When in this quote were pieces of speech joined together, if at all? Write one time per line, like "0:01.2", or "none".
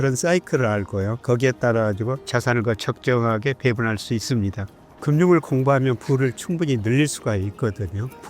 0:04.9

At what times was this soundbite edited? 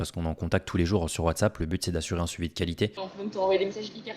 0:03.1

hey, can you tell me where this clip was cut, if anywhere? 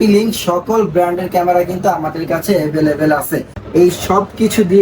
0:03.6

